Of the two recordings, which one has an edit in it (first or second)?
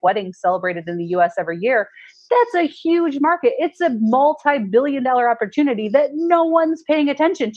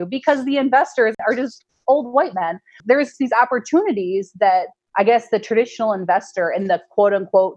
second